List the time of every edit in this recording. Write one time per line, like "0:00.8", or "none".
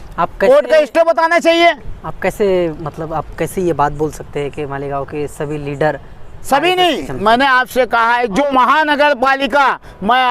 0:08.4